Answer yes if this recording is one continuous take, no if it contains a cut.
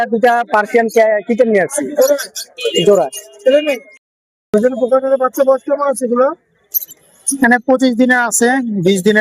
no